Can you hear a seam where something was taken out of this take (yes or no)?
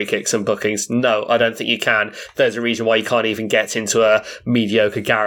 no